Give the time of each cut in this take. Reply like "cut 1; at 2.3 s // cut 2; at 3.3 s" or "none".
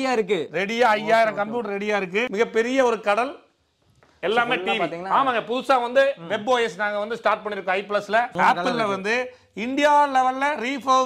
cut 1; at 2.3 s // cut 2; at 8.3 s